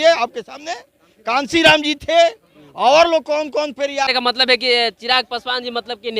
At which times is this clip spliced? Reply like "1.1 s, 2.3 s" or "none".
4.1 s